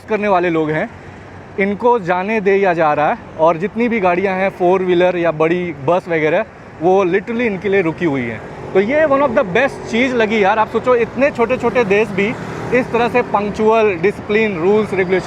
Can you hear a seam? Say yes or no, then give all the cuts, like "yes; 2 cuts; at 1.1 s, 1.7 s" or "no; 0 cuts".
no; 0 cuts